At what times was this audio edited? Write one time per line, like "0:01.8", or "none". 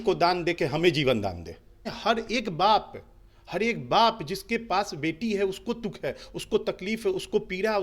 0:01.9